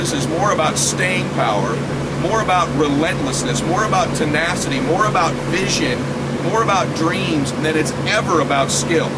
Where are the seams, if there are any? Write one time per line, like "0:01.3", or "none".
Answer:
none